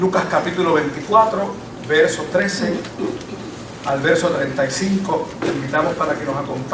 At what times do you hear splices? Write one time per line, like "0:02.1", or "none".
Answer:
none